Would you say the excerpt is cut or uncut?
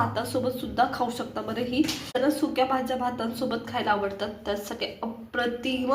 cut